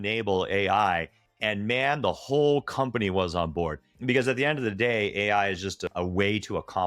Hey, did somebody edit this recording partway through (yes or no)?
yes